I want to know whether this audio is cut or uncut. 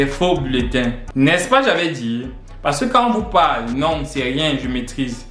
cut